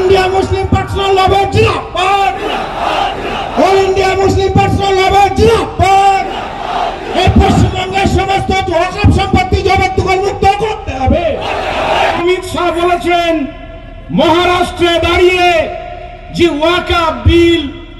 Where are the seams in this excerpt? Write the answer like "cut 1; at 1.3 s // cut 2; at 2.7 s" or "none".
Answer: cut 1; at 12.2 s